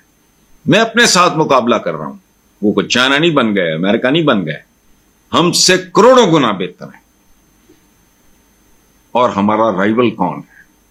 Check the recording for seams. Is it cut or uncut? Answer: uncut